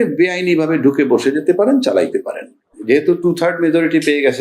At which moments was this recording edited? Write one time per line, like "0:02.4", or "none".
0:02.8